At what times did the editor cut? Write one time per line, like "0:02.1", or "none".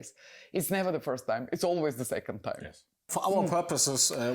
0:03.1